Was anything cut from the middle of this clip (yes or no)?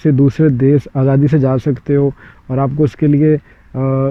no